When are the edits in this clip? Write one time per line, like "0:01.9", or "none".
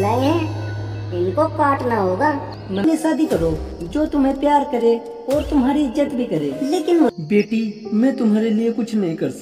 0:02.8
0:07.2